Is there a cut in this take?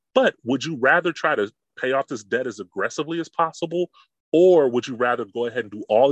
no; 0 cuts

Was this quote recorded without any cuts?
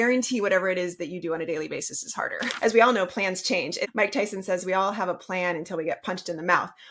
no; 2 cuts; at 2.5 s, 3.8 s

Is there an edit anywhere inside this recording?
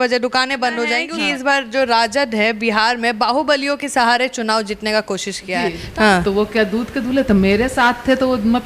yes; 2 cuts; at 1.1 s, 5.8 s

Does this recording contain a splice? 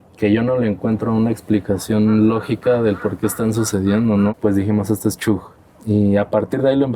yes; 1 cut; at 4.3 s

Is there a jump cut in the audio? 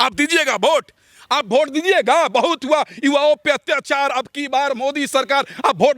no; 0 cuts

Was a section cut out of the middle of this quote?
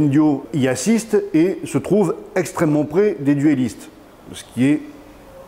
no; 0 cuts

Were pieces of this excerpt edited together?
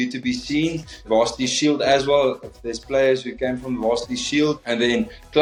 no; 0 cuts

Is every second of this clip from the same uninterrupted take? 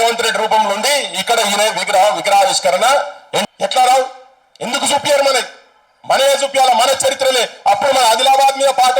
no; 1 cut; at 3.5 s

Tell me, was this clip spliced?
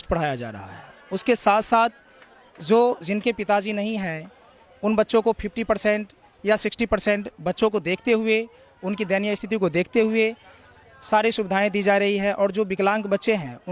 no; 0 cuts

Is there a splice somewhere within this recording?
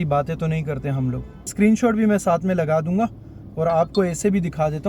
yes; 1 cut; at 1.5 s

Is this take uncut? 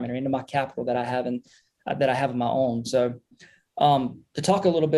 yes; 0 cuts

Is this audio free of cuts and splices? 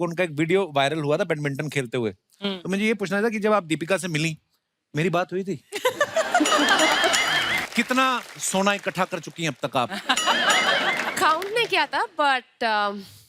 no; 1 cut; at 7.6 s

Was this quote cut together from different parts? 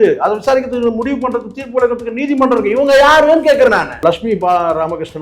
yes; 1 cut; at 3.9 s

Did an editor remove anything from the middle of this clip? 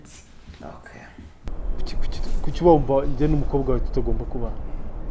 yes; 1 cut; at 1.5 s

